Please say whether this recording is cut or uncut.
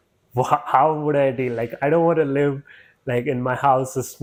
uncut